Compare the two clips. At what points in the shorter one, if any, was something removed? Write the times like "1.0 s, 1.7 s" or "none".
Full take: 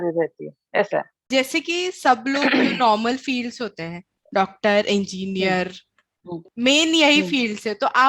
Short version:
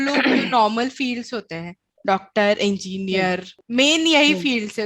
3.5 s

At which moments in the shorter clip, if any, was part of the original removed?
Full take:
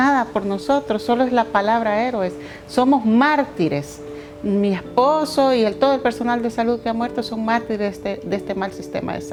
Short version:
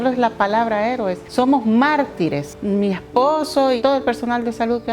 1.2 s, 2.5 s, 3.8 s

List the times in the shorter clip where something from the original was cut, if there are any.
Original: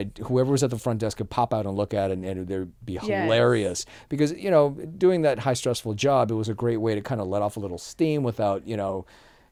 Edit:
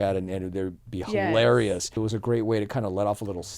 2.0 s

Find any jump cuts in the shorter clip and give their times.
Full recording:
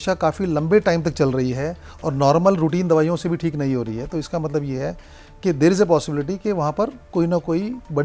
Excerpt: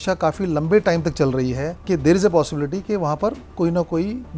1.7 s

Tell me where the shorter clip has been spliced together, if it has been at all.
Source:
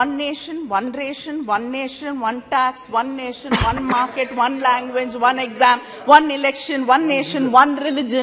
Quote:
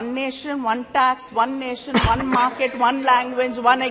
none

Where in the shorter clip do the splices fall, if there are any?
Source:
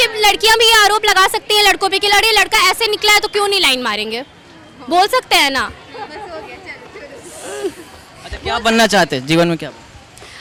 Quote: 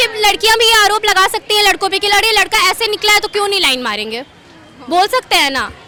none

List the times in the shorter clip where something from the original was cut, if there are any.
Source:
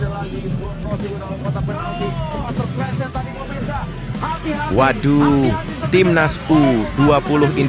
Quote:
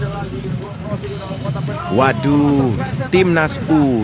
1.9 s

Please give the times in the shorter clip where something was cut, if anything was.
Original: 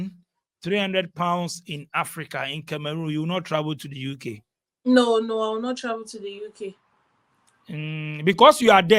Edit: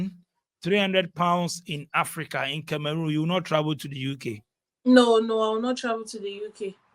none

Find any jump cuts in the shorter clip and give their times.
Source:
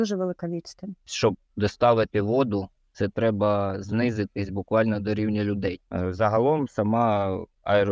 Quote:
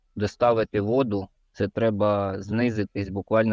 none

